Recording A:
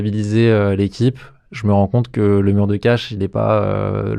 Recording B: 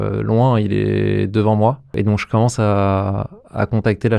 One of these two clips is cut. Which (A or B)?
B